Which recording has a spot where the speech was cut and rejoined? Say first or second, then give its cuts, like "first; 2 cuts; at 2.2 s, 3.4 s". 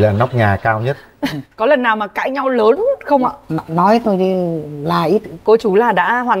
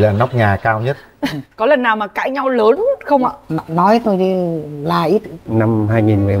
second; 1 cut; at 5.3 s